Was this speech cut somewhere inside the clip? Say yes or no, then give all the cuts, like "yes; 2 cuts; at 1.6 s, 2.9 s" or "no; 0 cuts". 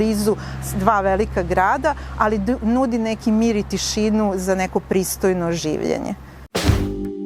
yes; 1 cut; at 6.3 s